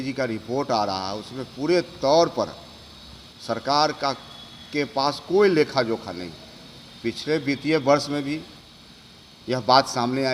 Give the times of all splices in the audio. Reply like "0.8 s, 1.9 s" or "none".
none